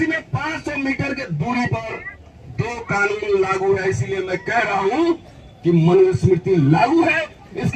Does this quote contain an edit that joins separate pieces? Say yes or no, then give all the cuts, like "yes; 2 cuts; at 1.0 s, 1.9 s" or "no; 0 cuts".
no; 0 cuts